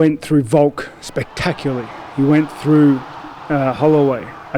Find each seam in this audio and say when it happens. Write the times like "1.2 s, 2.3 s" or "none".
none